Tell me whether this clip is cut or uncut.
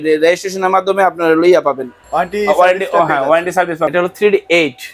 uncut